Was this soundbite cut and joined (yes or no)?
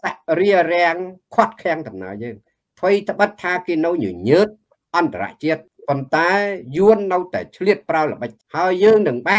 yes